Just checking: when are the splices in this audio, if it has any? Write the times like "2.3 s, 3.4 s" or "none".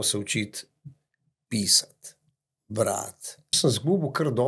3.5 s